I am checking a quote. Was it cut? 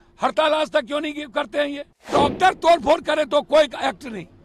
yes; 1 cut; at 2.1 s

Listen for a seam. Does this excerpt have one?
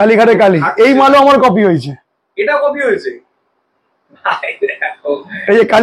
no; 0 cuts

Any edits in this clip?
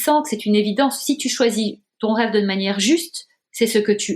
no; 0 cuts

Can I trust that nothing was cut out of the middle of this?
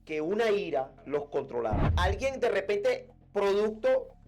no; 1 cut; at 1.9 s

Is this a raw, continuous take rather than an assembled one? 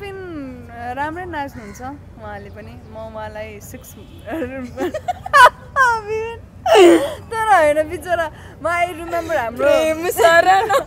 yes; 0 cuts

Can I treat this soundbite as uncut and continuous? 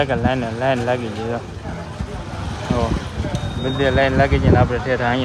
yes; 0 cuts

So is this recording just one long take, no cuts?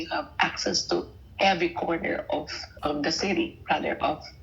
yes; 0 cuts

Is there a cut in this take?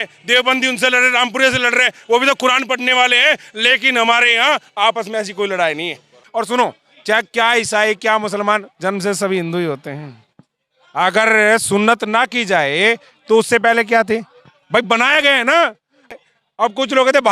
yes; 2 cuts; at 6.2 s, 16.1 s

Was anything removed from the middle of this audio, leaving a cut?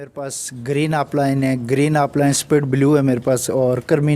no; 0 cuts

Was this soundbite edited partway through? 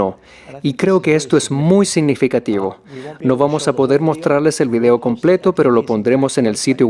no; 0 cuts

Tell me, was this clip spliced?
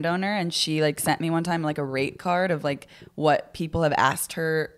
no; 0 cuts

